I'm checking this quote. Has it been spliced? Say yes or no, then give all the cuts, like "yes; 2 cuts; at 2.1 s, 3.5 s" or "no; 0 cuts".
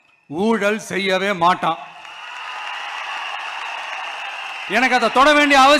yes; 1 cut; at 4.6 s